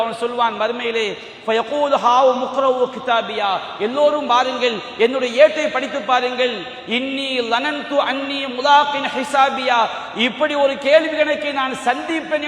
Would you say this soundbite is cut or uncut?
uncut